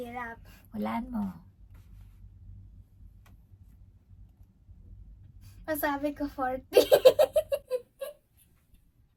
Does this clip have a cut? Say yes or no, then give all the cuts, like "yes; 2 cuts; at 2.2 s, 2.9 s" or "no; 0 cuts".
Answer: no; 0 cuts